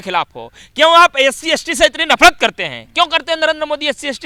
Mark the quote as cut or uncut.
uncut